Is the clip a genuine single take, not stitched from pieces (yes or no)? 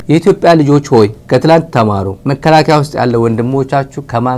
no